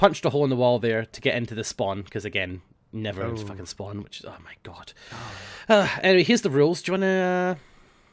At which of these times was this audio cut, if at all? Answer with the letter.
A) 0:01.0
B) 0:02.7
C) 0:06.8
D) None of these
A